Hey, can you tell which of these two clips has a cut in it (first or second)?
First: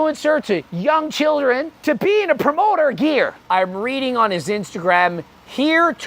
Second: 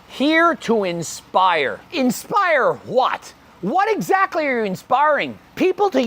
first